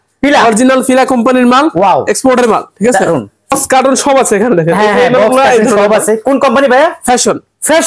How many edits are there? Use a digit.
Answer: 1